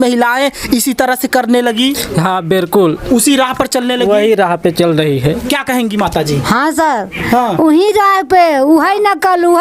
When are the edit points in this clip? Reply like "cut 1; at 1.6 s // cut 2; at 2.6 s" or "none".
none

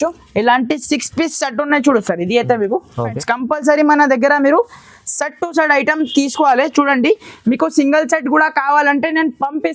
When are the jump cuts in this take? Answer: cut 1; at 3.2 s

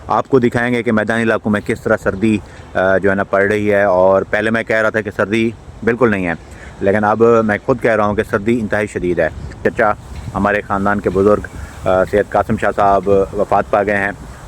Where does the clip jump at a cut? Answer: cut 1; at 9.6 s

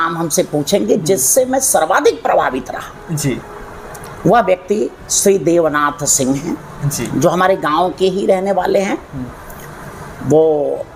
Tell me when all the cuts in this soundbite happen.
none

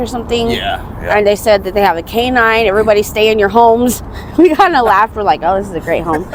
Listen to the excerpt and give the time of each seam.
none

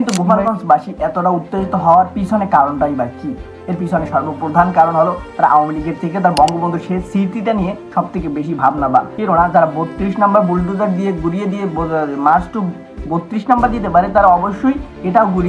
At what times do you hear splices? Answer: cut 1; at 9.1 s

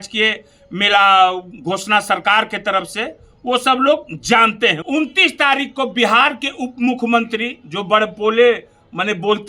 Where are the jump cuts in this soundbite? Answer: cut 1; at 4.8 s

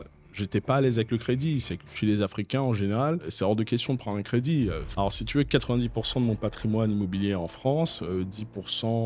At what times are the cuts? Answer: cut 1; at 1.8 s // cut 2; at 3.3 s // cut 3; at 4.8 s

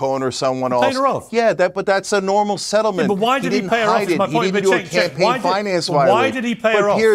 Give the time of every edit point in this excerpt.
none

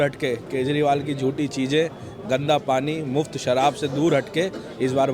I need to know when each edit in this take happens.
none

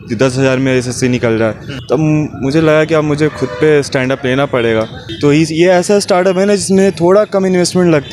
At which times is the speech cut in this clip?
cut 1; at 1.7 s // cut 2; at 5.0 s

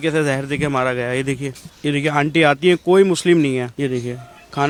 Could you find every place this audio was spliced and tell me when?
none

